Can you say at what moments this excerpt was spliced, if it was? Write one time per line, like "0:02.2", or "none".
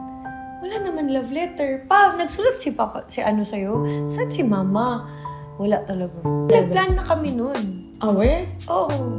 0:06.5